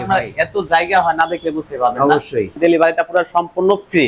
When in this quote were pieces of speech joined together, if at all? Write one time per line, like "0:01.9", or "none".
0:02.5

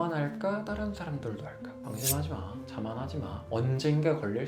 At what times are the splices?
0:01.8

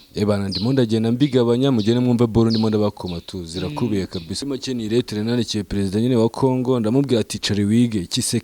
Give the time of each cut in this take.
0:04.4

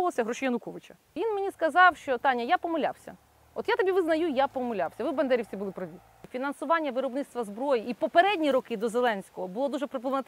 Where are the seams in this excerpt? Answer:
0:01.1
0:06.2

